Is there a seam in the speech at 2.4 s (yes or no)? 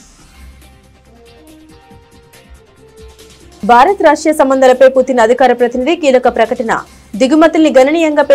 yes